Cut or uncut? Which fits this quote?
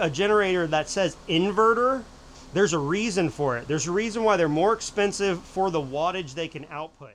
uncut